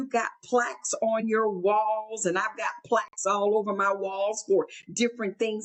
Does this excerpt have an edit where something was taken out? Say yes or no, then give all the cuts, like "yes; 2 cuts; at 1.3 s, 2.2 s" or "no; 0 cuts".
no; 0 cuts